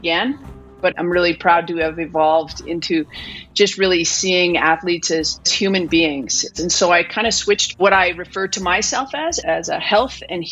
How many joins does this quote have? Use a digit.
5